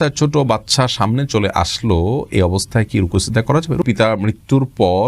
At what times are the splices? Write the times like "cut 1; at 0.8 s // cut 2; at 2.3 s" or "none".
cut 1; at 3.8 s